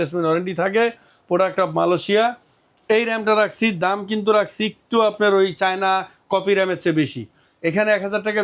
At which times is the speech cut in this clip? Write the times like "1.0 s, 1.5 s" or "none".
none